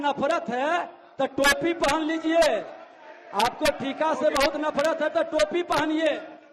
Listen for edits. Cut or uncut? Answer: uncut